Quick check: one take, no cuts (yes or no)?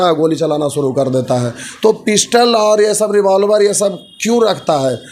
yes